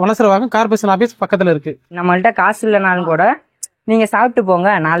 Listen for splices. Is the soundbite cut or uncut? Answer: cut